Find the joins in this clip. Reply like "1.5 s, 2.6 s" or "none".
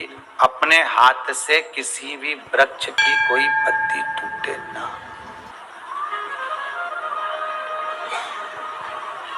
2.8 s, 4.4 s